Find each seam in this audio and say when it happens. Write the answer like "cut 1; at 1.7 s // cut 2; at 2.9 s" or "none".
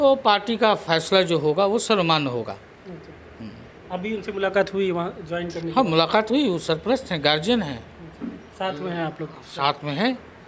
none